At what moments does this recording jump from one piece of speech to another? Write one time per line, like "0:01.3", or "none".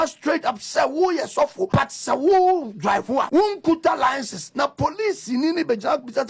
0:01.7
0:03.3